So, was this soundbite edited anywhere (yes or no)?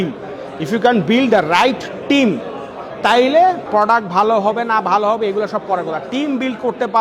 yes